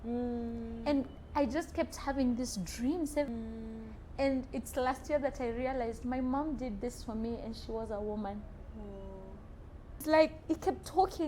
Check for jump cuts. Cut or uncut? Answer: cut